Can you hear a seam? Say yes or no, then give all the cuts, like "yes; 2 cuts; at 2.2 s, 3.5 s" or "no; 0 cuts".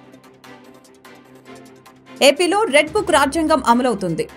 no; 0 cuts